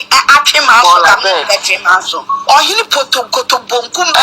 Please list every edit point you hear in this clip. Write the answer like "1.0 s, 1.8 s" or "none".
2.3 s